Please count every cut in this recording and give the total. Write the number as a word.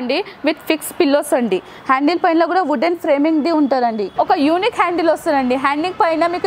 two